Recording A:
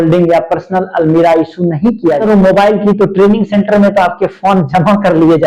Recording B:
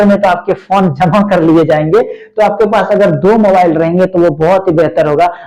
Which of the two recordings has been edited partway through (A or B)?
A